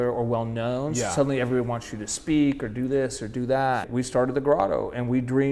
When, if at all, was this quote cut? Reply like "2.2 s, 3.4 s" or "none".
3.8 s